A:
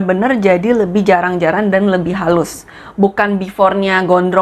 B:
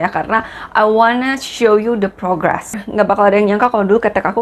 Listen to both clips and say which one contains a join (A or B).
B